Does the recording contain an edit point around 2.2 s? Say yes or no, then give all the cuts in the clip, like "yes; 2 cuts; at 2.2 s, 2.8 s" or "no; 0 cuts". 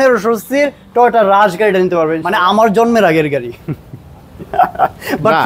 yes; 1 cut; at 2.2 s